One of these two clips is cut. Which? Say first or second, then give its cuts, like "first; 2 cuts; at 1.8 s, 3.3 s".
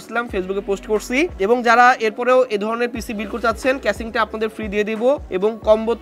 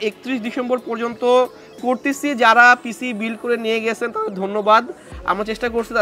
first; 2 cuts; at 1.3 s, 5.2 s